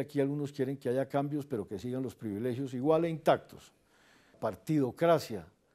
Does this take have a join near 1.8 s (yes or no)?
no